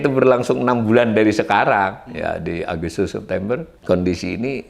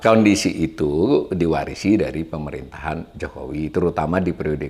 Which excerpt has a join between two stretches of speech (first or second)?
first